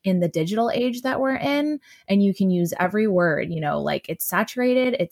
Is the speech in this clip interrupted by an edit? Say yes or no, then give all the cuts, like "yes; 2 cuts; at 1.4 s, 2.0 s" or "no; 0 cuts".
no; 0 cuts